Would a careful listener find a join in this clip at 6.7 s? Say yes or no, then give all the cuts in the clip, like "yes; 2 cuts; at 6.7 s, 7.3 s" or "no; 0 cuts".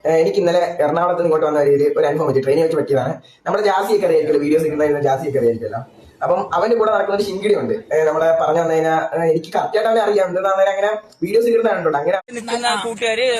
no; 1 cut; at 12.2 s